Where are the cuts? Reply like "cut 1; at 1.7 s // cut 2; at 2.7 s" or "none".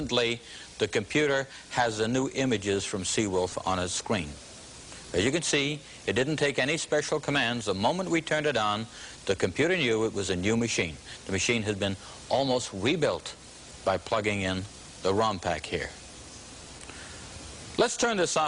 none